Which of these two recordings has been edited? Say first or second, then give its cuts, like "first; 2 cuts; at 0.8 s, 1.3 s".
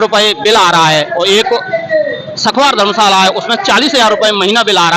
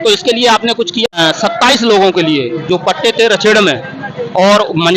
second; 1 cut; at 1.1 s